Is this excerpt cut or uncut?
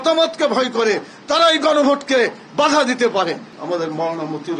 cut